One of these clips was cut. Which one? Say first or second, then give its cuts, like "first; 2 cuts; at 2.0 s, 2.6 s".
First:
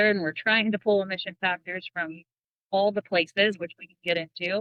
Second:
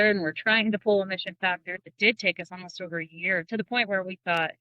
second; 2 cuts; at 1.9 s, 3.5 s